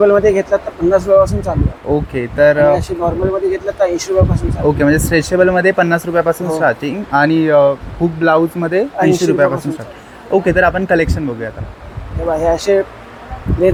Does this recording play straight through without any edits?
yes; 0 cuts

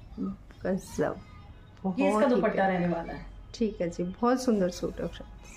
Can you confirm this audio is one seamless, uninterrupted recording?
yes; 0 cuts

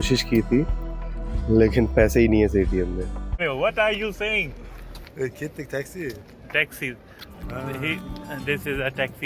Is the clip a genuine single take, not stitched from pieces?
no; 1 cut; at 3.4 s

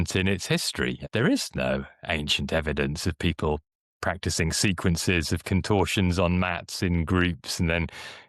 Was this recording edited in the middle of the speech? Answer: yes; 1 cut; at 1.0 s

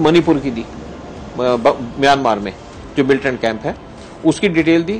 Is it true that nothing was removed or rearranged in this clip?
yes; 0 cuts

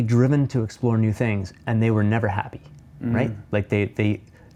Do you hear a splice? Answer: no; 0 cuts

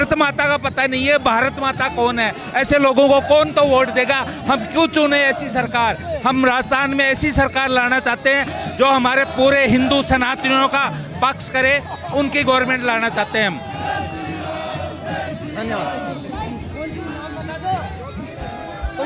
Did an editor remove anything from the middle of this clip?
no; 0 cuts

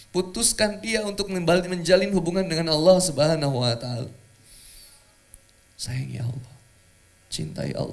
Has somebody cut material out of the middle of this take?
no; 0 cuts

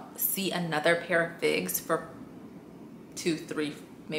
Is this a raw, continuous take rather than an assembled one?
yes; 0 cuts

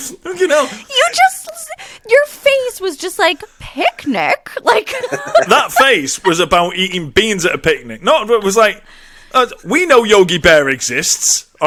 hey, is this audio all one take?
yes; 0 cuts

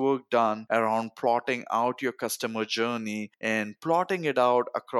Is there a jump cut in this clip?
no; 0 cuts

